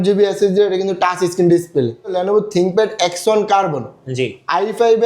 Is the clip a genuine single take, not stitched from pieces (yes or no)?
no